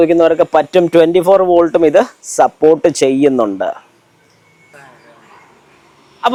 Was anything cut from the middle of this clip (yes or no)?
no